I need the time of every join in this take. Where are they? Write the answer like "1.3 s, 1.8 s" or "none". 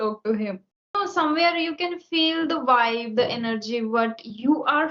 0.9 s